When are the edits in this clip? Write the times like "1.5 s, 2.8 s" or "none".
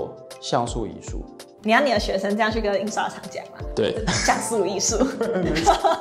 none